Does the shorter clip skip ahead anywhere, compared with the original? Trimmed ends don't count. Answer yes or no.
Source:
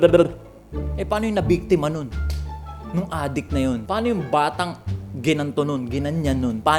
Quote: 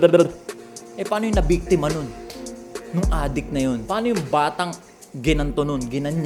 no